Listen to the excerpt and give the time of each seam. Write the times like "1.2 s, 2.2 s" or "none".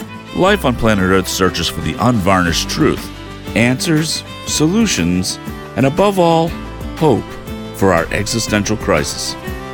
none